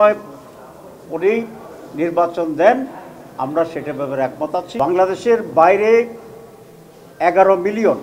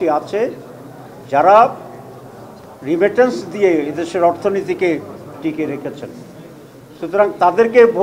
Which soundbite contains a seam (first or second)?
first